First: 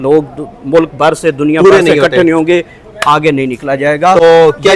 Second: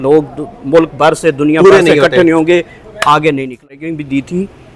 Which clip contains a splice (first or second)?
second